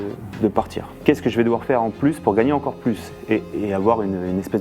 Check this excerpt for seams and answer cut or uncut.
cut